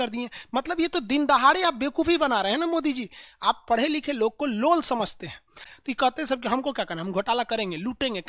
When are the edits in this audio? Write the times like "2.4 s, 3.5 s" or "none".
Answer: 5.6 s